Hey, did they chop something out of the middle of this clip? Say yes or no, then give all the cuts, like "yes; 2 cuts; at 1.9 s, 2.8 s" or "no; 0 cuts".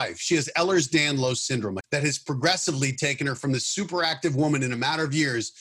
yes; 1 cut; at 1.8 s